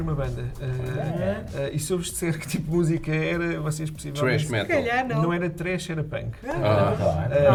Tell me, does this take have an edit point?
no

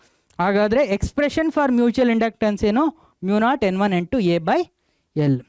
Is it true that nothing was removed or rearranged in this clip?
yes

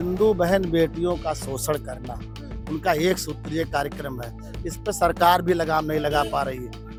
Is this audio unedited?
yes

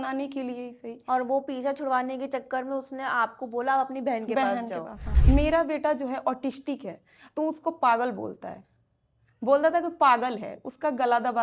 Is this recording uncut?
no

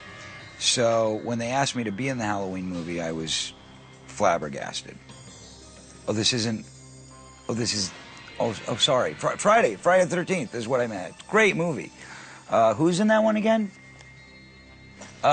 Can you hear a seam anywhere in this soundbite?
no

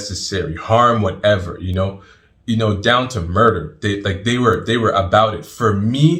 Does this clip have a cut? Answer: no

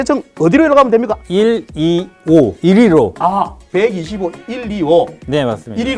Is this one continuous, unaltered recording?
no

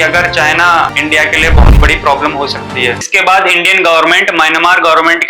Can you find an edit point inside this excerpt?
yes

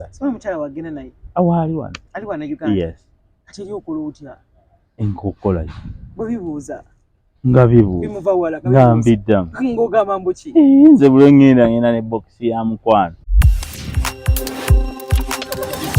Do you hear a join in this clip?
yes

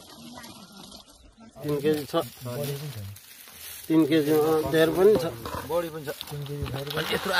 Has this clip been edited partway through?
yes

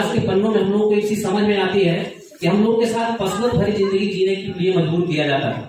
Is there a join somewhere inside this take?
no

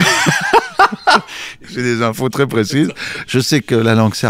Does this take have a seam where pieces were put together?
yes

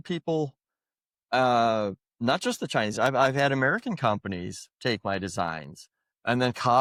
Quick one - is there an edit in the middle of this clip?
no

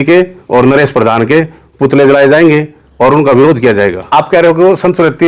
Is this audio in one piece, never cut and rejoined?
yes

